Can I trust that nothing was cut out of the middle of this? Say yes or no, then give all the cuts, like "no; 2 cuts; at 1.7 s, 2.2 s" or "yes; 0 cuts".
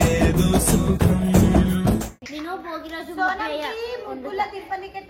no; 1 cut; at 2.2 s